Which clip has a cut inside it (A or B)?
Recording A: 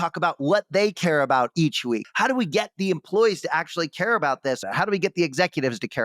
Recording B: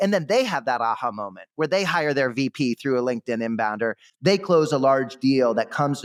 A